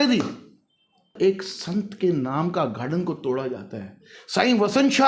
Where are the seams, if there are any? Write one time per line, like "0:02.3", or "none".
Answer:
0:01.1